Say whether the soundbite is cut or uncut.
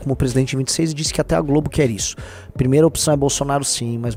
uncut